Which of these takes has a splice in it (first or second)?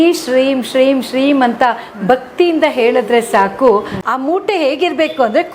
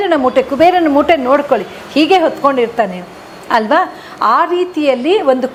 first